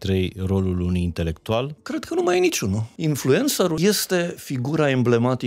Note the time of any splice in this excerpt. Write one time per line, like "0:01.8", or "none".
0:01.8
0:02.9
0:03.8